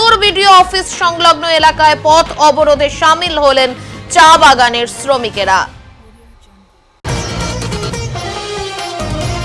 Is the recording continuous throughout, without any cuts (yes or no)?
no